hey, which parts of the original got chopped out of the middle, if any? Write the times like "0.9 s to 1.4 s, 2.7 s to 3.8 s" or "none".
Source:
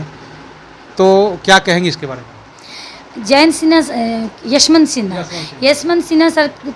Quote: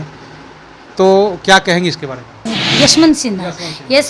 2.6 s to 4.3 s